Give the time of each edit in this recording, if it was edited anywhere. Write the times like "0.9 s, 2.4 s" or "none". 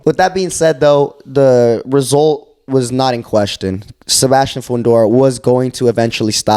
none